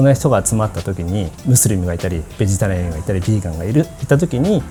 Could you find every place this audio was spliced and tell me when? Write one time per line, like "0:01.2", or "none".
none